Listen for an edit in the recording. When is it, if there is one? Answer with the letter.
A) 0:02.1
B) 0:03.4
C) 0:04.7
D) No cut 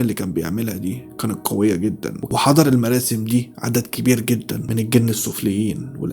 A